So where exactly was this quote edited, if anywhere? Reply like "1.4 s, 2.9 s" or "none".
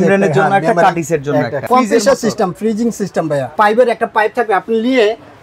1.6 s, 3.5 s